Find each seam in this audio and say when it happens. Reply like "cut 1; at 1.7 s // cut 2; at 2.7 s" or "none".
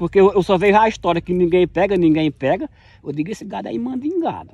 none